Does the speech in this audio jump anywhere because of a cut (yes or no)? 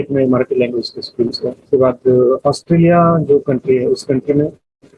yes